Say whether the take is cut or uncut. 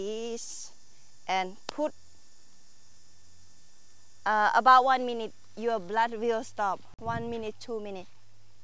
uncut